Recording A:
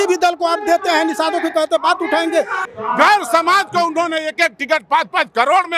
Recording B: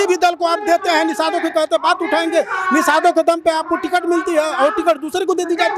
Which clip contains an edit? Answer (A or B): A